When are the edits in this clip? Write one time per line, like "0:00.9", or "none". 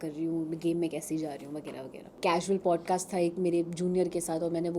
0:02.0

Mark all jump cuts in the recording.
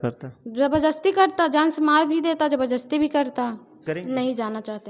0:03.9

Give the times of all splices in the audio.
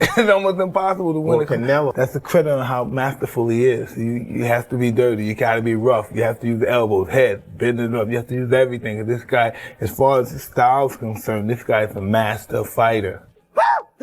0:12.4

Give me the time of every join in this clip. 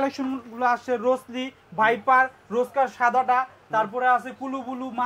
none

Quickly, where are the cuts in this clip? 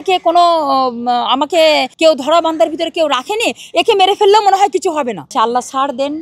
0:01.9
0:05.3

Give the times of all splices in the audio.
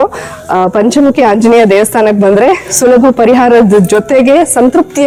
none

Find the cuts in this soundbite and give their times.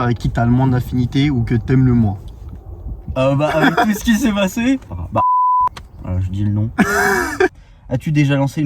0:04.9
0:07.5

